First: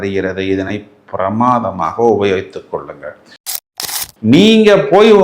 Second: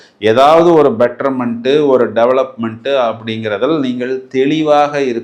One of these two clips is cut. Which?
first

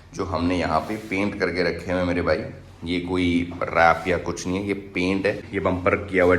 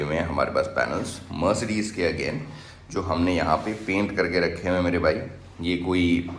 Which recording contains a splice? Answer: first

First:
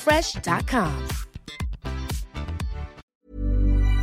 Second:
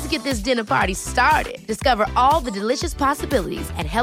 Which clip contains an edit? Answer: first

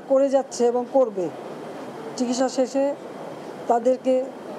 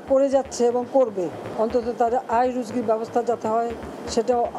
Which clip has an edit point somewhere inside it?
second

